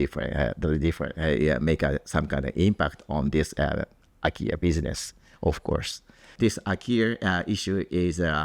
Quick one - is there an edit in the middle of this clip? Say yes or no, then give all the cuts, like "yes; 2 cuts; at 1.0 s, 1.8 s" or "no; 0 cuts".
yes; 1 cut; at 6.3 s